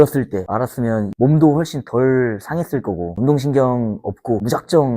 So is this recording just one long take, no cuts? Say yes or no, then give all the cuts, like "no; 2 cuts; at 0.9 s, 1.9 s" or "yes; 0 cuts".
no; 2 cuts; at 1.1 s, 3.1 s